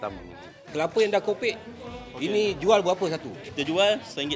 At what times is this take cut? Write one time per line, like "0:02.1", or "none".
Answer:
0:00.7
0:03.4